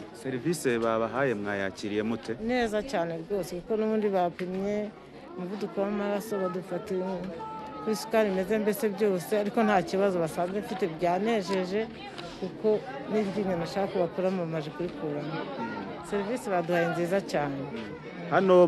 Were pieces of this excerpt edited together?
no; 0 cuts

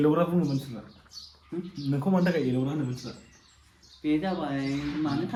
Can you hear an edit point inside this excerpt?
no; 0 cuts

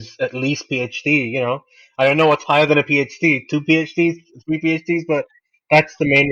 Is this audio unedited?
yes; 0 cuts

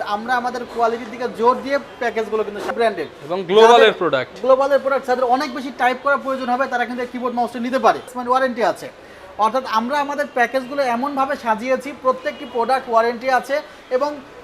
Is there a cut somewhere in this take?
yes; 2 cuts; at 2.7 s, 8.2 s

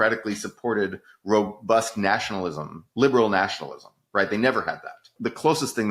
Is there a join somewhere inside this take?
no; 0 cuts

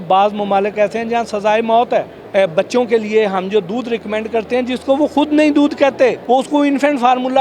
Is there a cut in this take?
yes; 2 cuts; at 2.2 s, 6.2 s

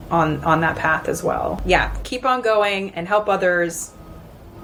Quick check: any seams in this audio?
no; 0 cuts

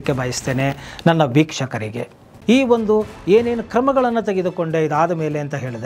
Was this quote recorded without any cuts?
no; 1 cut; at 2.3 s

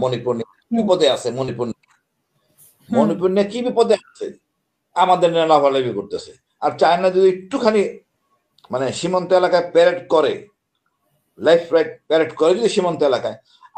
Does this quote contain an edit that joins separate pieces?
no; 0 cuts

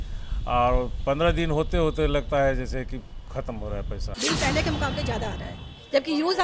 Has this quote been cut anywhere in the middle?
yes; 1 cut; at 4.1 s

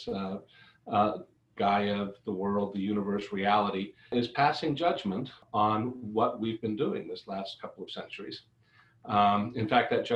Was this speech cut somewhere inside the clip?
yes; 2 cuts; at 4.1 s, 5.4 s

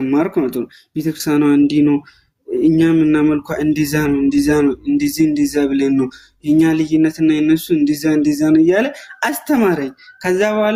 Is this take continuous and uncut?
yes; 0 cuts

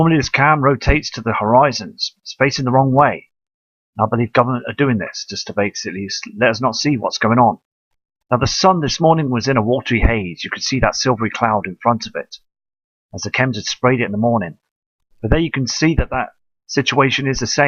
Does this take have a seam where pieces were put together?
no; 0 cuts

